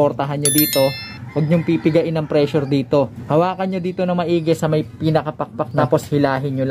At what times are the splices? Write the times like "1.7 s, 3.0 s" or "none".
3.2 s, 5.8 s